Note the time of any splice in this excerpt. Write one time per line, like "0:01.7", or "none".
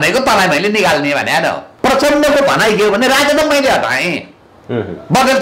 0:01.7